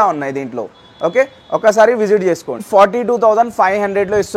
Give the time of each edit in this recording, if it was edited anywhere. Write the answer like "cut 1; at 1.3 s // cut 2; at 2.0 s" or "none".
cut 1; at 2.6 s

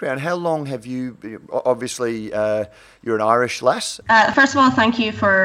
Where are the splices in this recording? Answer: cut 1; at 4.2 s

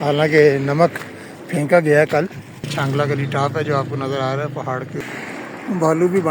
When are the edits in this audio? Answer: cut 1; at 2.7 s // cut 2; at 5.0 s

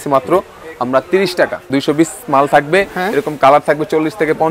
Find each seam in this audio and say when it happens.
cut 1; at 1.6 s

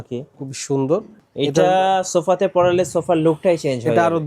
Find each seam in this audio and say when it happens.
cut 1; at 1.1 s

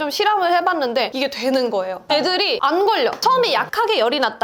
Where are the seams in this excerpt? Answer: cut 1; at 1.1 s // cut 2; at 2.1 s

